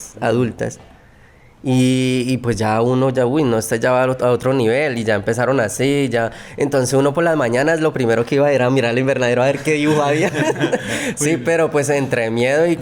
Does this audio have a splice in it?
no; 0 cuts

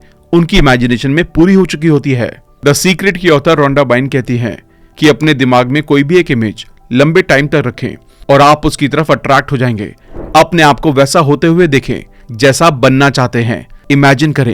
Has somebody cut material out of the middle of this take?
yes; 1 cut; at 10.0 s

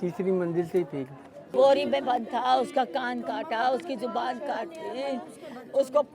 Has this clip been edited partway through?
yes; 1 cut; at 1.5 s

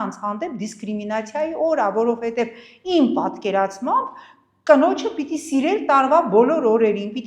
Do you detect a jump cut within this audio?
no; 0 cuts

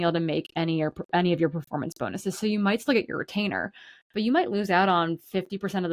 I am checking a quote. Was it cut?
no; 0 cuts

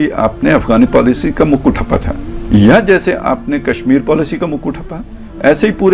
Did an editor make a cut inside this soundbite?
no; 0 cuts

